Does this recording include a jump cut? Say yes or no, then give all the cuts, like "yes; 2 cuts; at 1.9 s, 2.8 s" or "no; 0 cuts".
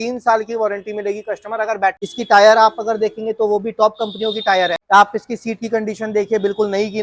yes; 2 cuts; at 2.0 s, 4.8 s